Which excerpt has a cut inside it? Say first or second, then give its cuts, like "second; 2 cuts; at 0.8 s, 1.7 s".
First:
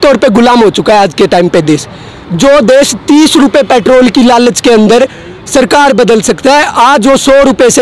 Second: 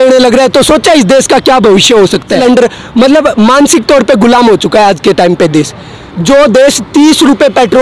second; 1 cut; at 2.4 s